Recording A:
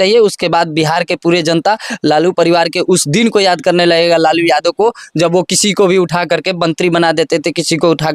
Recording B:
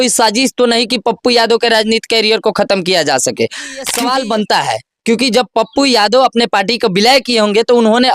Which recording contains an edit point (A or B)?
B